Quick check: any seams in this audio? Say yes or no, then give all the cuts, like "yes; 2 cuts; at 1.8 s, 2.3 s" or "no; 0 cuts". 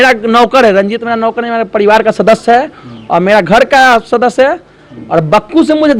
no; 0 cuts